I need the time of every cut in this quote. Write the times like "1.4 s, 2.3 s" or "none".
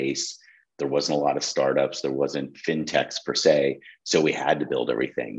none